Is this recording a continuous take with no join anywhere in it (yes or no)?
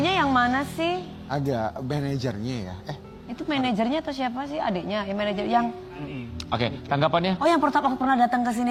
yes